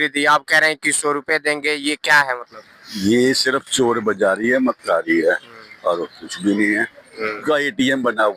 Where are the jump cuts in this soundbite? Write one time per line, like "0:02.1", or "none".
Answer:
0:07.4